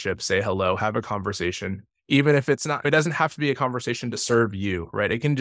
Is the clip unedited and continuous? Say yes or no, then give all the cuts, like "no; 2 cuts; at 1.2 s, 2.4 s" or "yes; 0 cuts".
yes; 0 cuts